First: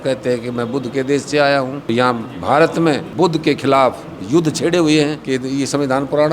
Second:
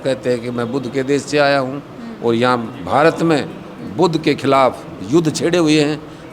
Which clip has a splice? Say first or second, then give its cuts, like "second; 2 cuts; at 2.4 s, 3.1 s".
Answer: first; 3 cuts; at 1.9 s, 3.1 s, 5.2 s